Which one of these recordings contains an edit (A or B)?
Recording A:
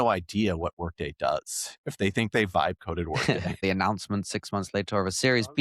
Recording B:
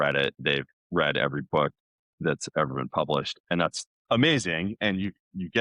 A